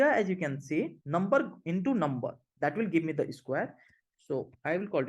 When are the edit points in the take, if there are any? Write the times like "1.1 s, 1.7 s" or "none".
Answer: 1.0 s